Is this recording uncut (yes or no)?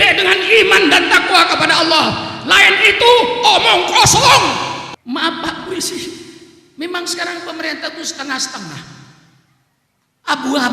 no